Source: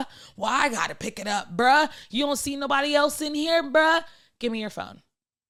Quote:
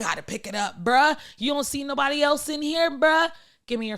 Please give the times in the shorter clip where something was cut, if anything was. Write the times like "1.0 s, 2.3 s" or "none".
none